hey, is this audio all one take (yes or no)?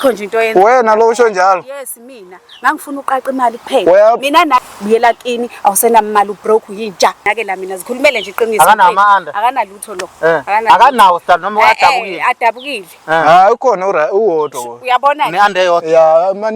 no